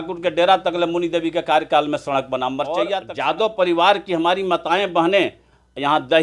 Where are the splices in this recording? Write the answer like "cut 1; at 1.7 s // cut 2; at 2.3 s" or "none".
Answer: cut 1; at 2.9 s